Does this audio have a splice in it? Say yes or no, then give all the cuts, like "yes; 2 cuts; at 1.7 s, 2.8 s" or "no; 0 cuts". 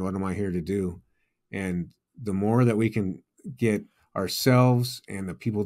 no; 0 cuts